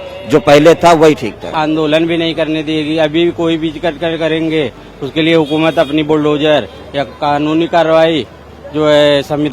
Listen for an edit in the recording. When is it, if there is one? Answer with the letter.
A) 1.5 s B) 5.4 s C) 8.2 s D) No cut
A